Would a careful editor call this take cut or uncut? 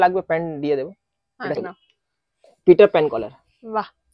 cut